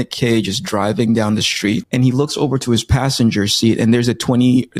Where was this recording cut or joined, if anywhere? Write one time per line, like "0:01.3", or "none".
0:01.9